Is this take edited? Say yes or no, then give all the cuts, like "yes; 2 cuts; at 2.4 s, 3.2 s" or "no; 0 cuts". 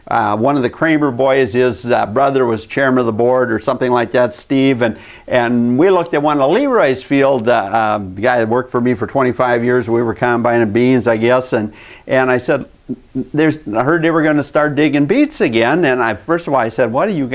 yes; 1 cut; at 7.4 s